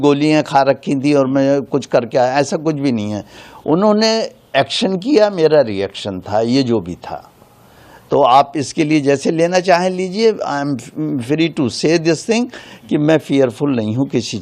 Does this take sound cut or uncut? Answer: uncut